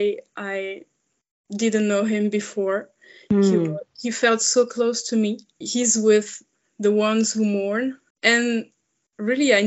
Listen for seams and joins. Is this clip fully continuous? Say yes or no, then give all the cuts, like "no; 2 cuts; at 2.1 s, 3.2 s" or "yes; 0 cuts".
no; 2 cuts; at 5.6 s, 8.1 s